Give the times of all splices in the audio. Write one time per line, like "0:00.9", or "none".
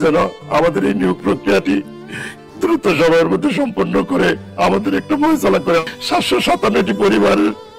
0:05.8